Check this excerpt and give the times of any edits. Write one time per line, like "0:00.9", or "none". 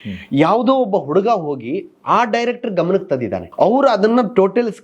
0:03.5